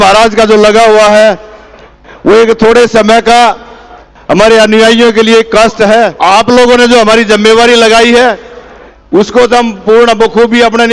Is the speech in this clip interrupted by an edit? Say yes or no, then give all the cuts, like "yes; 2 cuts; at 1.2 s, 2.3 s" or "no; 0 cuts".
yes; 1 cut; at 6.1 s